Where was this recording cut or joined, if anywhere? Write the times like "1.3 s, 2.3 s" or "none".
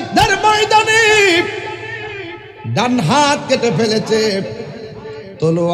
none